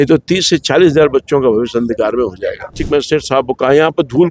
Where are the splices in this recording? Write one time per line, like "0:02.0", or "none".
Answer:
0:02.6